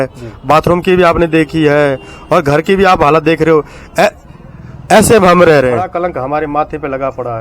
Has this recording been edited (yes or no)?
yes